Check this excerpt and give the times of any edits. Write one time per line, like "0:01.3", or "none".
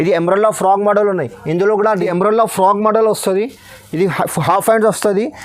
0:02.0